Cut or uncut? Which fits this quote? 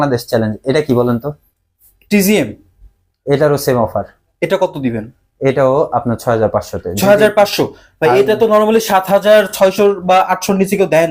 uncut